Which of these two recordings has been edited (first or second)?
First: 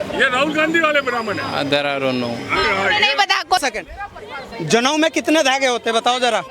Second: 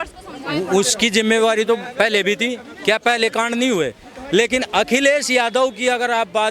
first